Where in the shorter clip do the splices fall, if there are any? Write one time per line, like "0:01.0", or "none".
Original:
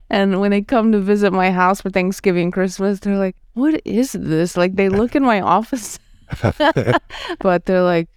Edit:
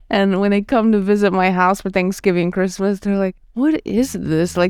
none